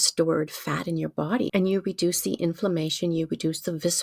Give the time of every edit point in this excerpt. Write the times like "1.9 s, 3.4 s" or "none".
1.5 s